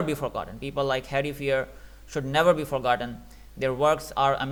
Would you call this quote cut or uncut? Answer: uncut